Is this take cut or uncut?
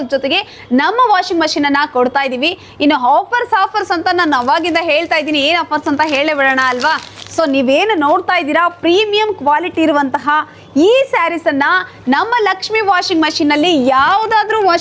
uncut